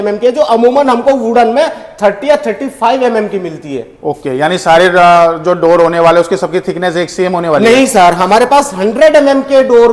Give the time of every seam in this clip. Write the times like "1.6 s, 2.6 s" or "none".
none

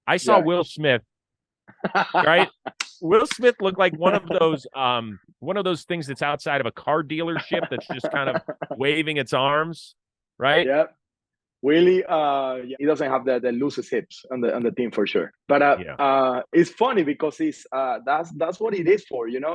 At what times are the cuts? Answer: 12.8 s, 15.3 s

